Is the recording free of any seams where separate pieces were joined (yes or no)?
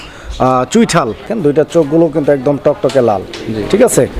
no